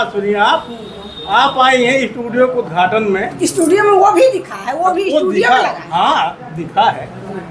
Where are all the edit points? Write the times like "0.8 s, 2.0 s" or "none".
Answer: none